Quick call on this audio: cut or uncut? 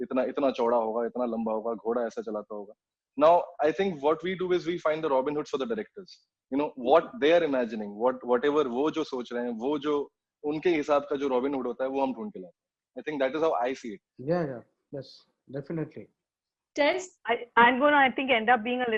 uncut